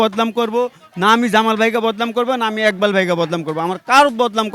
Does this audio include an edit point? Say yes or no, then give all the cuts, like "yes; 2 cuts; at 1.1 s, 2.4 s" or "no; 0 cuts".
no; 0 cuts